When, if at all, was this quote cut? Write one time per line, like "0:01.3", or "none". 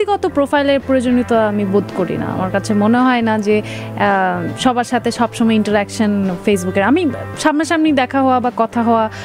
none